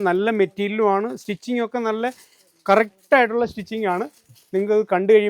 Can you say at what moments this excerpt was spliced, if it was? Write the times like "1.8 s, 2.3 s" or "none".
none